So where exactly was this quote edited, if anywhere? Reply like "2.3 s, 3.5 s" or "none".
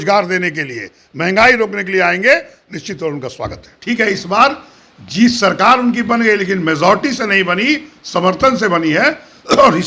3.7 s